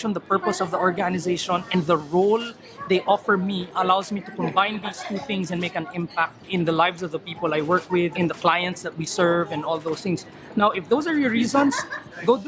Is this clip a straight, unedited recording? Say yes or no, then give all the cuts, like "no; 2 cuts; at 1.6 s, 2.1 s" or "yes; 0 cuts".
yes; 0 cuts